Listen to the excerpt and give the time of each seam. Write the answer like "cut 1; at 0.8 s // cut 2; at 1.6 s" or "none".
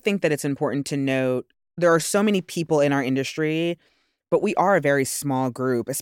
cut 1; at 1.6 s